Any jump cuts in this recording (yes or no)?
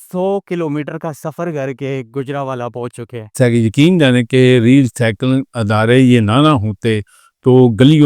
yes